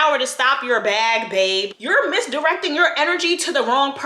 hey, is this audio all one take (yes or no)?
no